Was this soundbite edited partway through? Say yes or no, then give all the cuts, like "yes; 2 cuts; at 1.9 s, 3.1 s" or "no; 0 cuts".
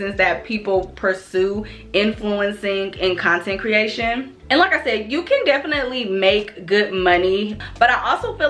no; 0 cuts